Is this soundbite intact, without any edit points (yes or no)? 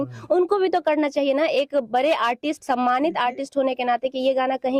yes